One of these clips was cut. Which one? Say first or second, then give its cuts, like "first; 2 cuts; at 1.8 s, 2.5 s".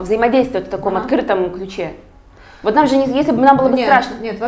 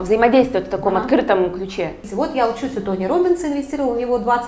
second; 1 cut; at 2.0 s